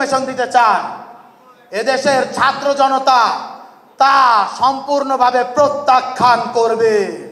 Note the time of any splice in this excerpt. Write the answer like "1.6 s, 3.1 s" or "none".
none